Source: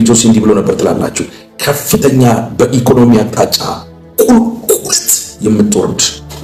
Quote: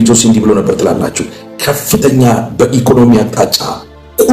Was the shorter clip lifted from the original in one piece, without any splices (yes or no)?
yes